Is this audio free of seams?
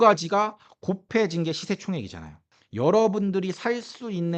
no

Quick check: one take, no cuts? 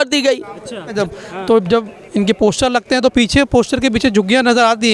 no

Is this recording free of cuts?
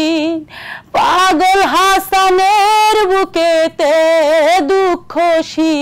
yes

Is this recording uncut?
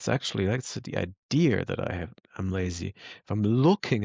yes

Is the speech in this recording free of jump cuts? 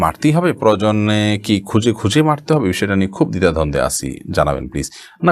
yes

